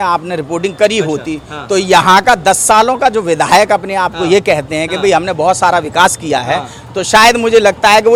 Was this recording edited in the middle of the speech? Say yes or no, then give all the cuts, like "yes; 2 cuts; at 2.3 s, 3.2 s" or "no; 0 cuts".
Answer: no; 0 cuts